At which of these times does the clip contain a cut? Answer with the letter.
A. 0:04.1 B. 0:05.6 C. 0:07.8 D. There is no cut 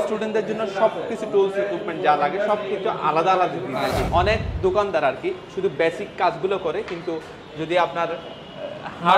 A